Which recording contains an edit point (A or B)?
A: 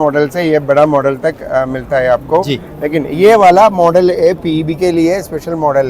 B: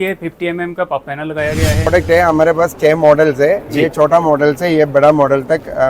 B